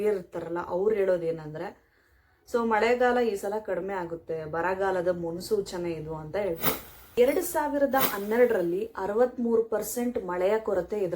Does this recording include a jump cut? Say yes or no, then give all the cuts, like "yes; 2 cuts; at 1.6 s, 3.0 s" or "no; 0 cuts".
yes; 1 cut; at 7.0 s